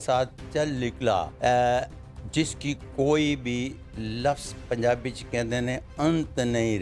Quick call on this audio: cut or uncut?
cut